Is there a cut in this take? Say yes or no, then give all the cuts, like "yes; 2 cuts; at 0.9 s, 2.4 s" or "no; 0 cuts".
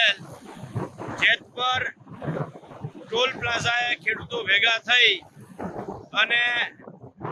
no; 0 cuts